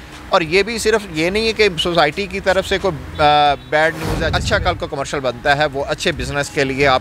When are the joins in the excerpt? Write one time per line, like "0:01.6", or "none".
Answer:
0:04.3